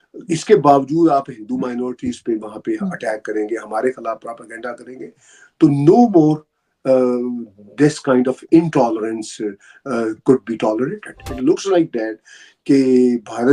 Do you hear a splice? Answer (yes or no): yes